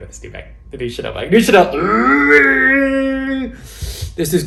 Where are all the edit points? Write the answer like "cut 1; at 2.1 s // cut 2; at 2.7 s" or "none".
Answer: none